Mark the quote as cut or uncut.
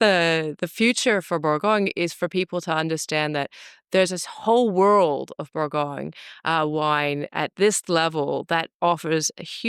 uncut